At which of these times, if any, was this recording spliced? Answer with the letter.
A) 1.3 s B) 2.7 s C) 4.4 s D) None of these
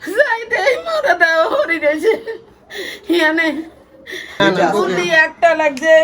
C